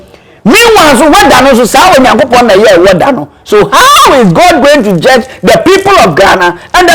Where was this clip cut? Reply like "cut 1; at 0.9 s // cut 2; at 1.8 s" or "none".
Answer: none